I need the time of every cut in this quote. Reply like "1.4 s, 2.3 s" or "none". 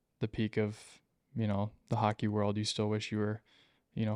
none